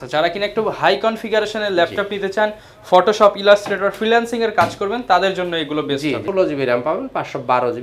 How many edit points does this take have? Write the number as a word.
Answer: one